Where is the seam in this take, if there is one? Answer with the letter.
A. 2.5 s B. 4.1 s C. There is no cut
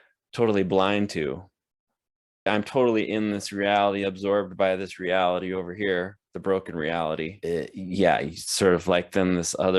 A